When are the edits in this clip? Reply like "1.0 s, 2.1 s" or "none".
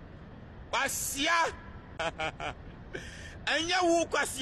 1.9 s